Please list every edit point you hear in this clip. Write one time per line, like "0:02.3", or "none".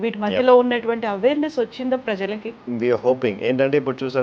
0:02.6